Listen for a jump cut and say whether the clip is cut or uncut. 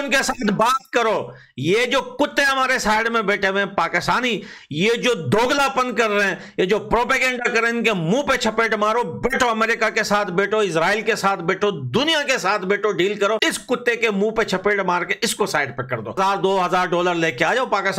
cut